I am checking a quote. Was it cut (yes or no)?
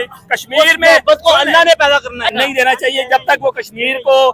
yes